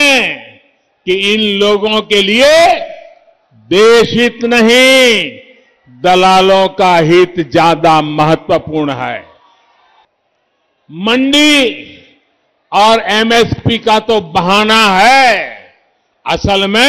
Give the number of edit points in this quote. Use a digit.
1